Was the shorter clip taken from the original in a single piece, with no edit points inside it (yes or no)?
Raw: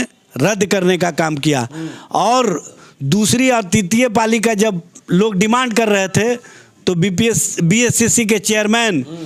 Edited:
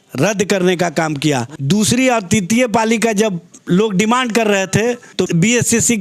no